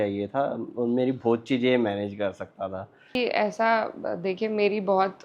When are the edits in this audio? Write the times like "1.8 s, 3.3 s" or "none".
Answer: 3.2 s

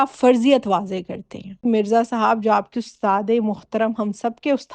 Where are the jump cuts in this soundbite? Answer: 1.6 s

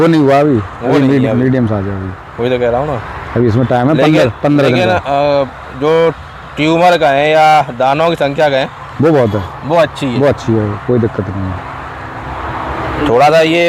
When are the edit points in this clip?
none

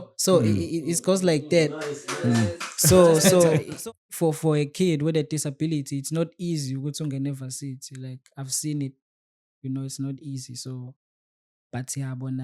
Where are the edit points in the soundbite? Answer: 3.7 s

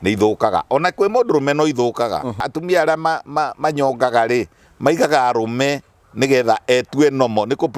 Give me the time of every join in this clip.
2.4 s

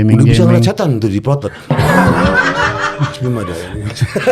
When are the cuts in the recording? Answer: none

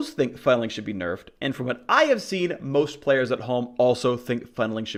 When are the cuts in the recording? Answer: none

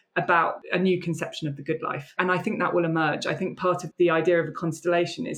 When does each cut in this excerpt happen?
2.1 s, 3.8 s

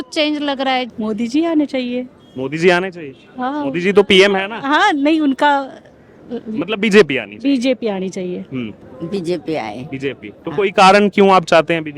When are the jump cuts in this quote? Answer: 0.9 s, 8.8 s

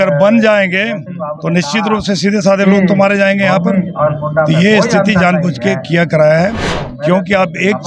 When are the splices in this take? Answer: 6.6 s

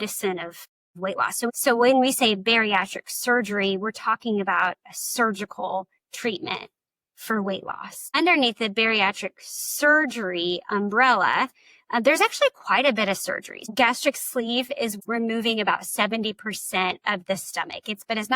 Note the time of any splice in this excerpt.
1.5 s, 8.2 s, 13.7 s, 14.9 s

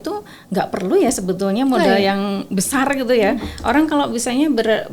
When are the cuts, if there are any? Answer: none

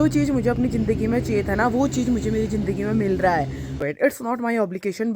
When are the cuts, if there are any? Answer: 3.9 s

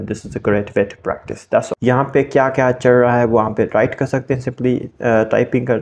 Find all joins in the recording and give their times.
1.7 s

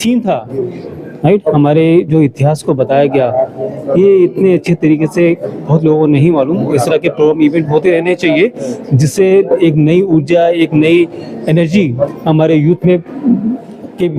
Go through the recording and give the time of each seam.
none

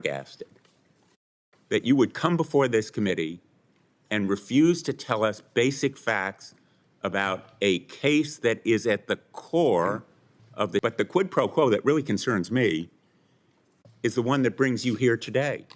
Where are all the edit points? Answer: 10.8 s

